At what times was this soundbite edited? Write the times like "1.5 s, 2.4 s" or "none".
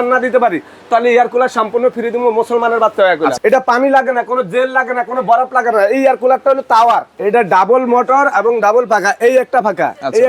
3.4 s, 7.1 s